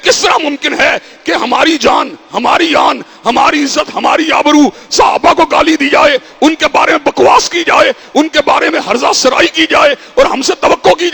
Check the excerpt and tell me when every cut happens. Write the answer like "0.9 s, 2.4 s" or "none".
none

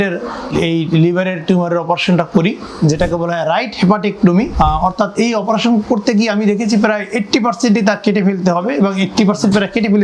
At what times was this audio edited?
4.5 s

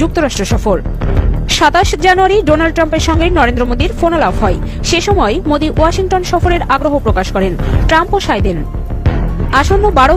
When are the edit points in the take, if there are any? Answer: none

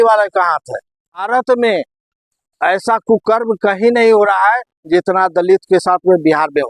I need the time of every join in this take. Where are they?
1.2 s

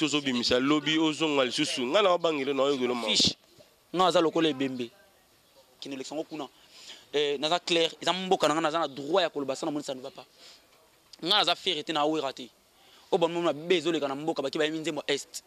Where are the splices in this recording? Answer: 5.8 s

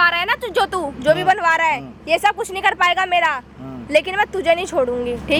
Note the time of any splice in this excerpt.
none

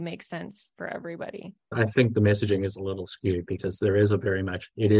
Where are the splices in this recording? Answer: 1.7 s

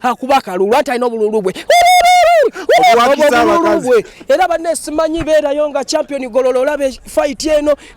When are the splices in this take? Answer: none

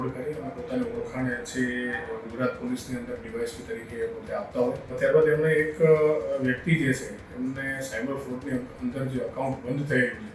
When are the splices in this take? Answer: 5.0 s

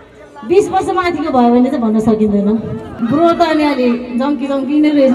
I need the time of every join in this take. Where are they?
2.8 s

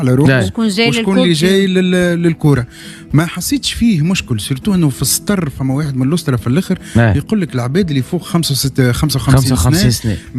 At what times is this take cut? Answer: none

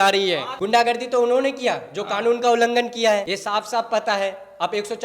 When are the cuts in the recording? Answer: 0.7 s, 3.4 s

